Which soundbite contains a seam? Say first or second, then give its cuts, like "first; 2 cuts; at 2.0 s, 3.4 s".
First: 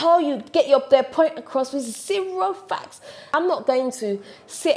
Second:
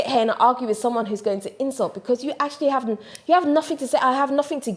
first; 1 cut; at 3.3 s